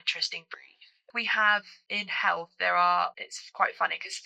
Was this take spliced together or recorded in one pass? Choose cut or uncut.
cut